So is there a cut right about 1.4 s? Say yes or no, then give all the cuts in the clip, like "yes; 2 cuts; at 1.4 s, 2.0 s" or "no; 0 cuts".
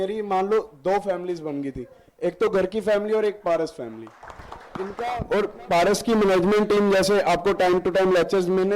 no; 1 cut; at 4.8 s